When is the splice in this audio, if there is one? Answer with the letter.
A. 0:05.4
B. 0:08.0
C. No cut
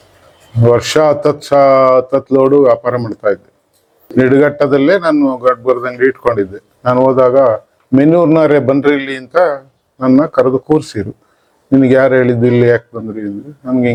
C